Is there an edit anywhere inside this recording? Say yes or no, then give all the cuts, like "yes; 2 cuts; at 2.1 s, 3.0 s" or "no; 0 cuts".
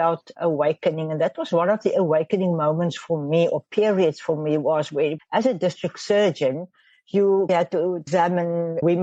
no; 0 cuts